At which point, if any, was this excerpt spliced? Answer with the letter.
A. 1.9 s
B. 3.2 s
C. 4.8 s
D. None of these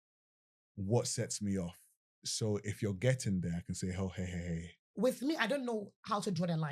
C